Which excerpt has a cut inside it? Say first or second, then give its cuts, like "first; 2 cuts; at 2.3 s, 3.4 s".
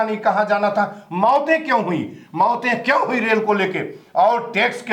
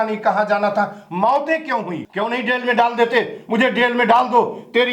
second; 1 cut; at 2.0 s